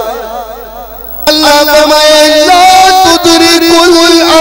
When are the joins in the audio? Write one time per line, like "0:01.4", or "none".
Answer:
0:01.3